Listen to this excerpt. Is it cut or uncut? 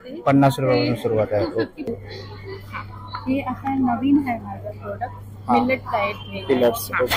cut